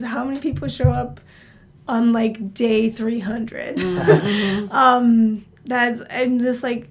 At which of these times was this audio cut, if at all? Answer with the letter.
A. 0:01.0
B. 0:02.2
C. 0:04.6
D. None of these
D